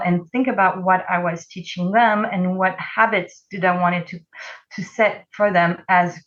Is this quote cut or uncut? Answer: uncut